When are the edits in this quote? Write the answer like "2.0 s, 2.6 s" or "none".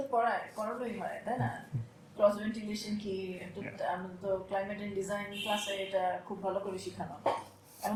none